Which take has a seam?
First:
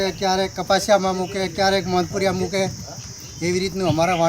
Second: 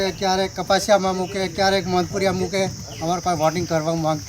second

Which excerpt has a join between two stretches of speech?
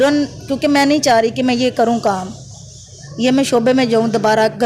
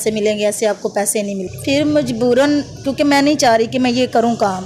second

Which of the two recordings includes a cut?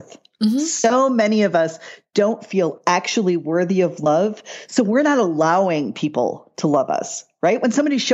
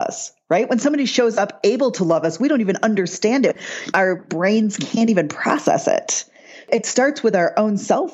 second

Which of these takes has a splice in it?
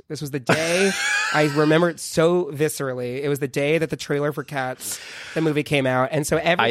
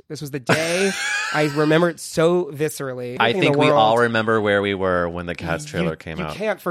second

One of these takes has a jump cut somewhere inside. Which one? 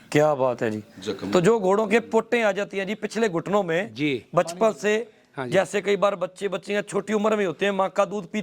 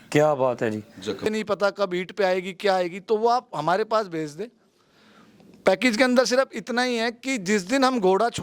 second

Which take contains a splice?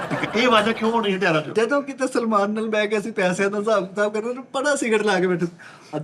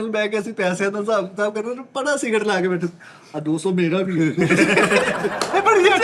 first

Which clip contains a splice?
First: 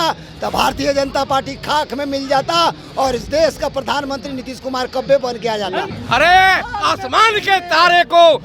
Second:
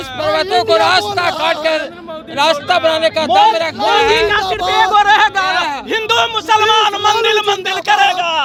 first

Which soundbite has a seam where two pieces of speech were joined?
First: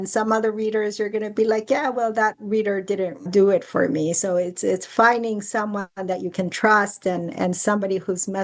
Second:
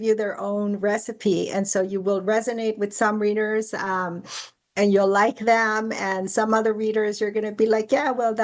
first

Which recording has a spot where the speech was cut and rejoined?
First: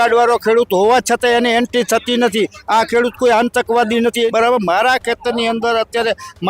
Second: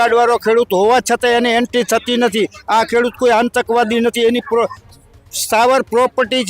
first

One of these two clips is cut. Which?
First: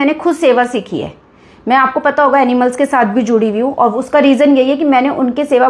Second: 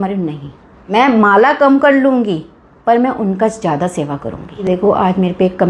second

